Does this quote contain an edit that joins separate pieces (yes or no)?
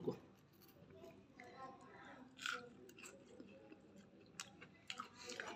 no